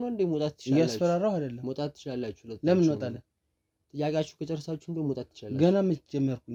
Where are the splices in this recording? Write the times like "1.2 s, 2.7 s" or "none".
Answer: none